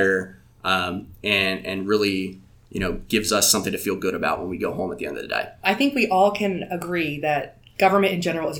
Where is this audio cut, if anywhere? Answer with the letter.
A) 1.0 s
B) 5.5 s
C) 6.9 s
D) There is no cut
B